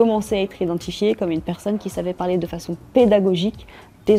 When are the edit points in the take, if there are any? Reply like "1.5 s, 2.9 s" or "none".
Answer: none